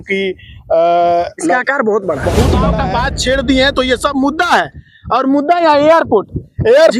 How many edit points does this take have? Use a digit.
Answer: 1